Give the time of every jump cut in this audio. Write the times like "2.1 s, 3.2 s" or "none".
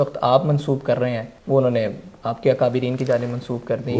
1.3 s